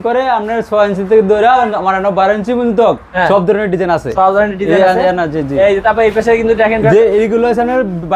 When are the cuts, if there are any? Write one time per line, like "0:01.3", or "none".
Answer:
none